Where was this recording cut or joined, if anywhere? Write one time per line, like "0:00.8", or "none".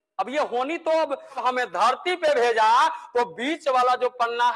0:01.4